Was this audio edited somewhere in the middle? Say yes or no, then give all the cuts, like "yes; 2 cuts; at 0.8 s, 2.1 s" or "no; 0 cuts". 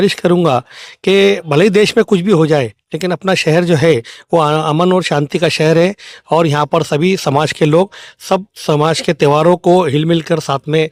no; 0 cuts